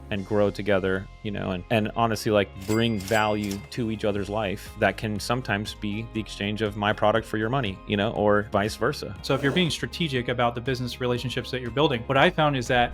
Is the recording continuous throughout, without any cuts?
no; 1 cut; at 9.1 s

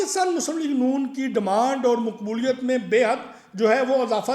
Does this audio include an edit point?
no; 0 cuts

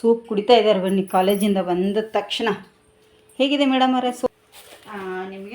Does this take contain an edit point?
yes; 1 cut; at 4.3 s

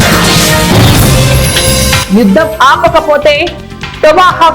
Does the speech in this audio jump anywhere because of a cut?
yes; 1 cut; at 2.0 s

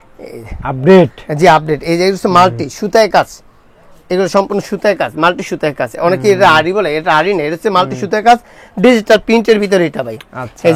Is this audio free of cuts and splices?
yes; 0 cuts

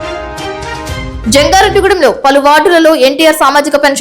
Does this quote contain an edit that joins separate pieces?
yes; 1 cut; at 1.1 s

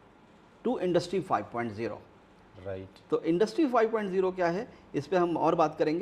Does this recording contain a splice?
no; 0 cuts

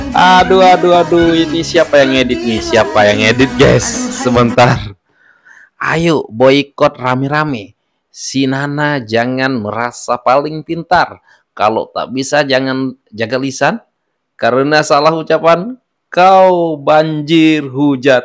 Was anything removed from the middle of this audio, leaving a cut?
no; 0 cuts

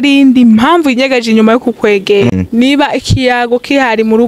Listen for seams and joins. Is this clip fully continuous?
no; 1 cut; at 2.3 s

